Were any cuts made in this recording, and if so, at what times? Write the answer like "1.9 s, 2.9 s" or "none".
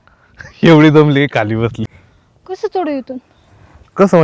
2.0 s